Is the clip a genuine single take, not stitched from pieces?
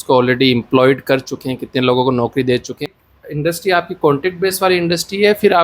no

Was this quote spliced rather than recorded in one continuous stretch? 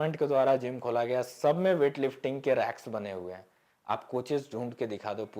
no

